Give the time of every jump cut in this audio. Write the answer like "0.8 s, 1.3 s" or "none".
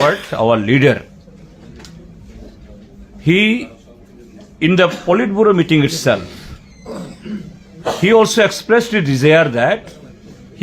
1.3 s